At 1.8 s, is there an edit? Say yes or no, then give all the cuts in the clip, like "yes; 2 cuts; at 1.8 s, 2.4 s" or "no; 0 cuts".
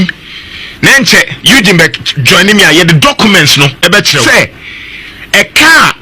no; 1 cut; at 4.2 s